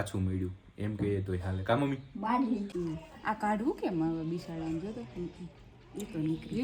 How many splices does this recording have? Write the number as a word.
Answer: one